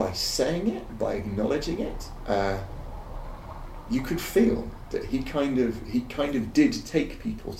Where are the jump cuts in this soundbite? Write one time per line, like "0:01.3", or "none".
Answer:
none